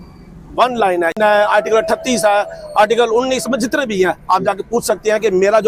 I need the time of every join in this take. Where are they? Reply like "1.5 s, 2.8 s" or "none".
1.2 s